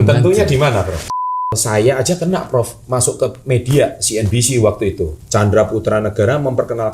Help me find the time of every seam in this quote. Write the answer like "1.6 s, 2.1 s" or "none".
1.5 s, 5.2 s

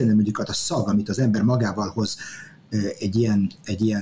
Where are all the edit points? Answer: none

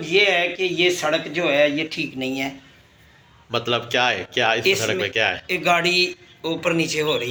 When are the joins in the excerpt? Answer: none

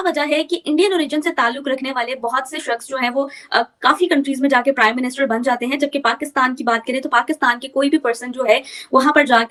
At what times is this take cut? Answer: none

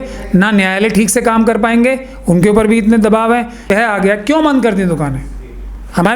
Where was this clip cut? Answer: 3.7 s

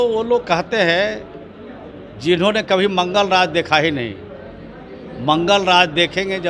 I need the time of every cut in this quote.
none

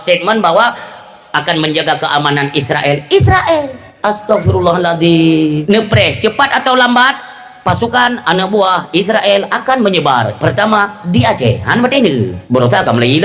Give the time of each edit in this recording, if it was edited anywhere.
3.8 s, 5.6 s, 12.4 s

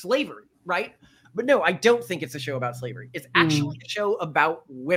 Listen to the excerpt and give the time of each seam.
1.2 s

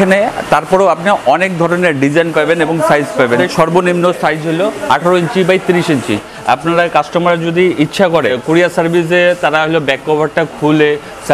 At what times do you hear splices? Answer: 3.4 s, 6.2 s, 8.4 s

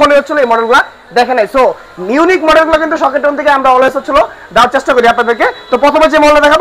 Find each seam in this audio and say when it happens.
none

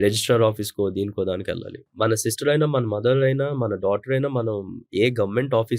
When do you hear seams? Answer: 1.8 s

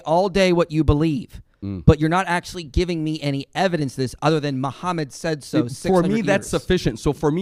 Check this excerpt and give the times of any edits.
none

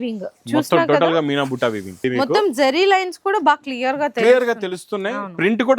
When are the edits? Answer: 2.0 s

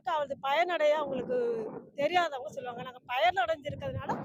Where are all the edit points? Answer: none

